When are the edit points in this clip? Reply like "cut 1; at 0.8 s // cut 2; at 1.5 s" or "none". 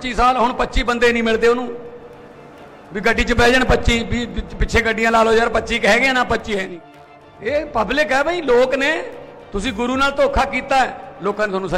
cut 1; at 6.7 s